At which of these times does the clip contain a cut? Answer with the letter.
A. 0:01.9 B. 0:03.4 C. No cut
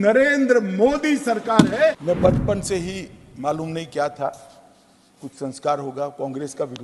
A